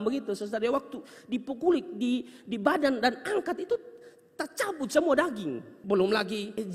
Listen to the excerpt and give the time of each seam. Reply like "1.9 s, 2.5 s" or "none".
5.7 s